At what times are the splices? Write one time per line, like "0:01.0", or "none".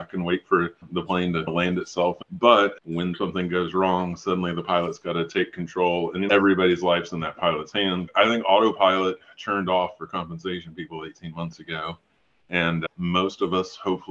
0:02.2
0:03.1
0:08.1